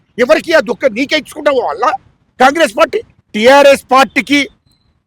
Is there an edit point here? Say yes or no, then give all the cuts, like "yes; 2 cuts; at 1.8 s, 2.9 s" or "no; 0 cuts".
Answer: yes; 1 cut; at 3.2 s